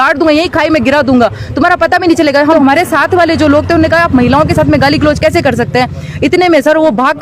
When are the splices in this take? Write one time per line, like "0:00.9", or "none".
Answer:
0:02.5